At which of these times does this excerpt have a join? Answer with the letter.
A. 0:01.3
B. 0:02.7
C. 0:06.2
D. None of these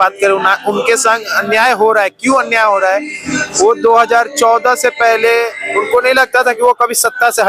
D